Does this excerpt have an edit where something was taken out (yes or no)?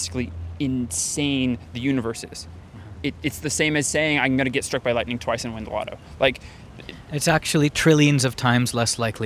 no